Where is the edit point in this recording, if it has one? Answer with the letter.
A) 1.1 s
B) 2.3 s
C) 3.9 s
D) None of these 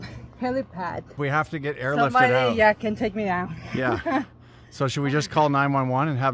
A